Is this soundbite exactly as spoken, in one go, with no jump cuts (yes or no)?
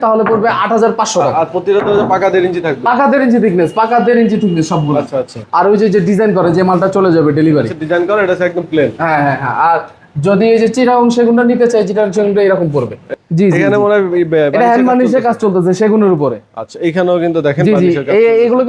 no